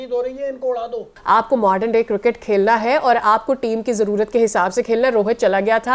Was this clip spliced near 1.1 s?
yes; 1 cut; at 1.1 s

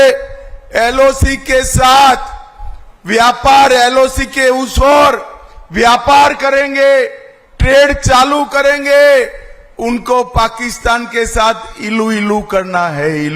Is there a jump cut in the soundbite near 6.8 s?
no; 0 cuts

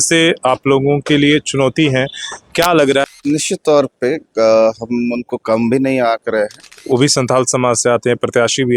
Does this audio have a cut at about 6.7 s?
yes; 2 cuts; at 3.0 s, 6.7 s

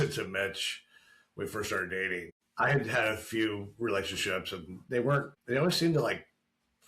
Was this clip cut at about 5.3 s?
yes; 2 cuts; at 2.4 s, 5.3 s

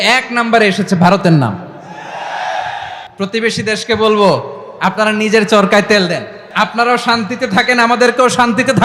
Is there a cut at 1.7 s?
no; 2 cuts; at 3.0 s, 6.4 s

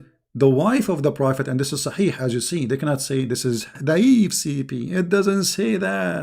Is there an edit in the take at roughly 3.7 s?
yes; 1 cut; at 3.7 s

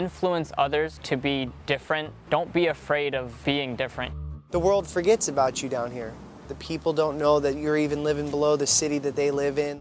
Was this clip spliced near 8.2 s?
no; 5 cuts; at 1.0 s, 2.1 s, 3.3 s, 4.2 s, 6.6 s

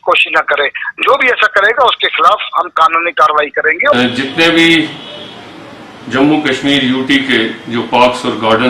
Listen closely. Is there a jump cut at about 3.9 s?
yes; 1 cut; at 3.9 s

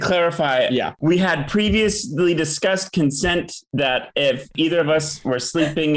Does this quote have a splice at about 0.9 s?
yes; 1 cut; at 0.9 s

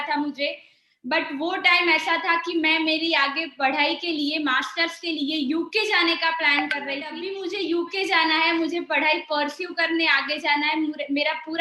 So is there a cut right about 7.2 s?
yes; 1 cut; at 7.2 s

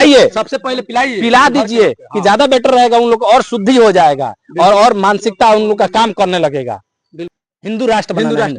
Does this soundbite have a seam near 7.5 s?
yes; 1 cut; at 7.5 s

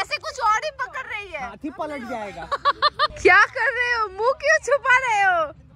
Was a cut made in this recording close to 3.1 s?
yes; 1 cut; at 3.1 s

